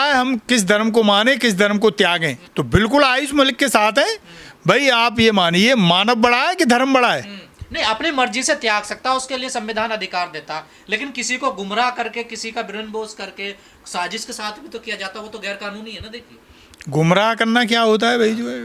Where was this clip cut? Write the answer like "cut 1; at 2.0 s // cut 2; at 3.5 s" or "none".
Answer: none